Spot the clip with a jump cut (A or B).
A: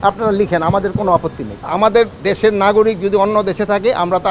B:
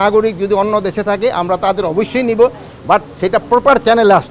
A